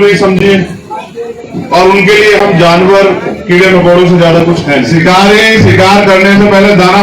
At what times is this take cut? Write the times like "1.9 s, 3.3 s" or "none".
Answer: 4.9 s